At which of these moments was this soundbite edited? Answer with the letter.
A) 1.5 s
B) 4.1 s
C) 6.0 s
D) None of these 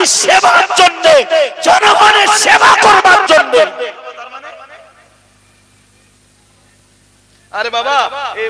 B